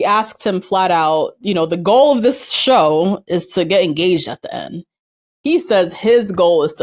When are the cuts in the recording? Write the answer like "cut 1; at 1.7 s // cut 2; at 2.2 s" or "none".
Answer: none